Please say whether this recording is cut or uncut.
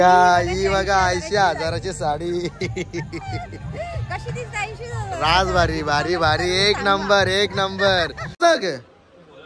cut